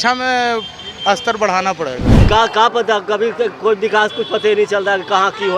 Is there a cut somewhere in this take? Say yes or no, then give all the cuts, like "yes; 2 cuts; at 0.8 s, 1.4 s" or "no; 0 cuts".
yes; 1 cut; at 2.1 s